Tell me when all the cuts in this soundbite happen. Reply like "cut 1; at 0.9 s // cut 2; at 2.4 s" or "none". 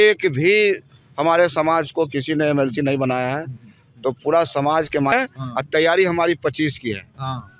cut 1; at 5.1 s